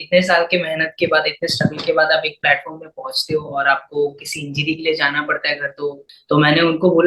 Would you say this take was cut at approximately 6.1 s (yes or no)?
yes